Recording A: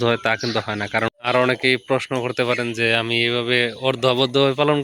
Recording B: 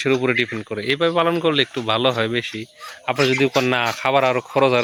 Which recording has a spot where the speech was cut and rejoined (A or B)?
A